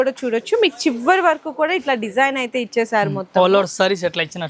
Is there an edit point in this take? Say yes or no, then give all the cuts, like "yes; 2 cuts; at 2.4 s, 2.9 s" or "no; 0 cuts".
no; 0 cuts